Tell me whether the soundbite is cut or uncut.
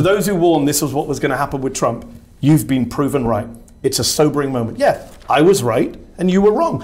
uncut